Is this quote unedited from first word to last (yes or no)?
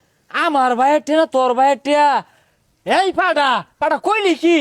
yes